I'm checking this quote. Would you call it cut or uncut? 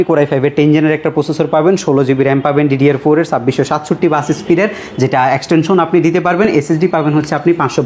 uncut